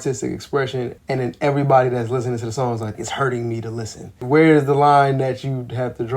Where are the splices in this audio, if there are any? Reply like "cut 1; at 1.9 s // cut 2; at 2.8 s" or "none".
cut 1; at 1.0 s // cut 2; at 3.0 s // cut 3; at 4.2 s